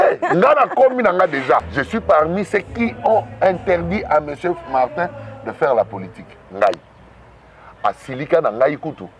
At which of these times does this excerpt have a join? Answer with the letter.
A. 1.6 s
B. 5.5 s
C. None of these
A